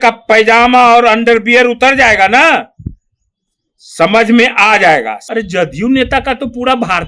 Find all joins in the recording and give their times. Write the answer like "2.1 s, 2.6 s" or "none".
5.2 s